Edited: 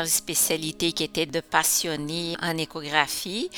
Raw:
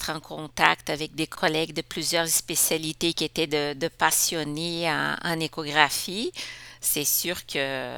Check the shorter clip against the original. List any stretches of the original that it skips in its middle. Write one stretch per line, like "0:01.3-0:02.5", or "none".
0:03.5-0:03.8
0:04.8-0:05.2

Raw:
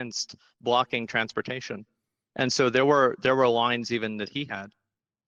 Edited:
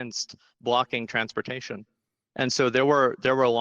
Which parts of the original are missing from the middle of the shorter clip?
none

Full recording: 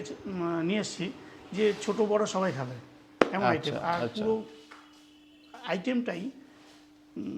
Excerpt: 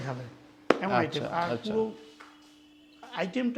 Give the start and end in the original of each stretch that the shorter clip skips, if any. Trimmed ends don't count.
none

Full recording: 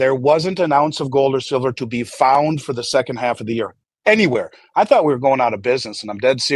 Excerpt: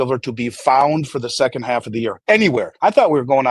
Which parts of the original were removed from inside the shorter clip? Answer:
0:03.7-0:03.9
0:04.5-0:04.7

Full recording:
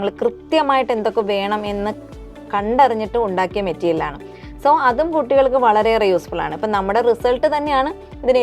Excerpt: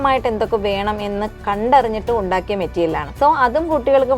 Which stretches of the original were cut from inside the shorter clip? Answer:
0:02.0-0:02.4
0:04.1-0:04.5

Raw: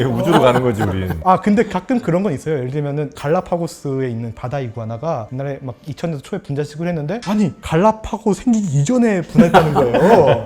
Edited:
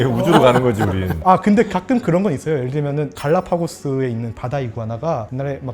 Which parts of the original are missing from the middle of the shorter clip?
none

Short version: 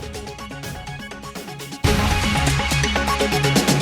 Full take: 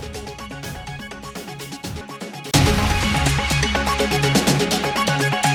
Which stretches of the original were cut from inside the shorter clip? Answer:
0:01.8-0:02.6

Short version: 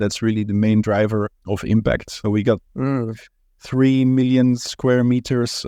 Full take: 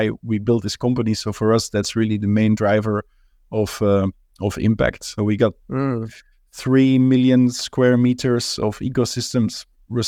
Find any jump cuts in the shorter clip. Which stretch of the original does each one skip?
0:03.2-0:04.4

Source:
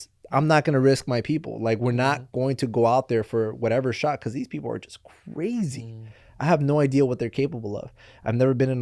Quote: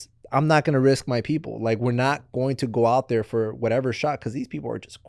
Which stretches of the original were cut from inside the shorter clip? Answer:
none

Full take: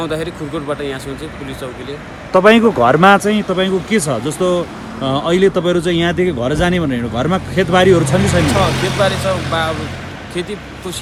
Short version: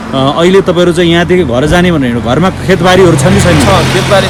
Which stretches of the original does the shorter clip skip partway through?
none

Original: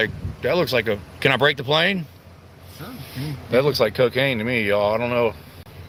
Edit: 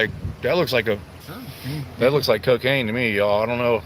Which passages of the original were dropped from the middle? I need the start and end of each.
0:01.1-0:02.6

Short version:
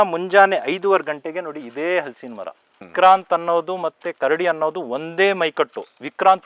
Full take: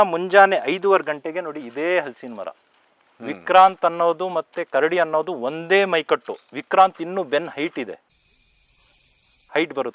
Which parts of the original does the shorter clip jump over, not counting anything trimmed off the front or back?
0:02.9-0:03.4

